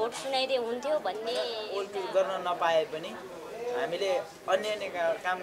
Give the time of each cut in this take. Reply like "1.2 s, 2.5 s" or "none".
1.6 s